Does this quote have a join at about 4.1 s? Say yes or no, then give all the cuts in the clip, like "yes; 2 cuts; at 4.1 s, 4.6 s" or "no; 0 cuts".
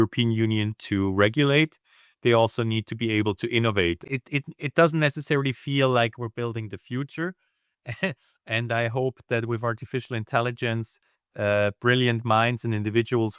yes; 1 cut; at 4.1 s